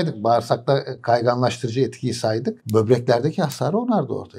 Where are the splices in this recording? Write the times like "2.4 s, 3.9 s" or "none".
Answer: 2.6 s